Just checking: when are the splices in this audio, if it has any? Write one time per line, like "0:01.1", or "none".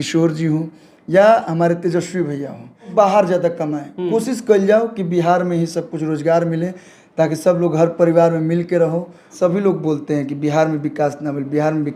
0:02.9
0:09.3